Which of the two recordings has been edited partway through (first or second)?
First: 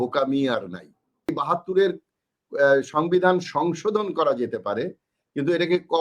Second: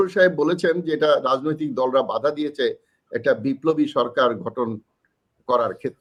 first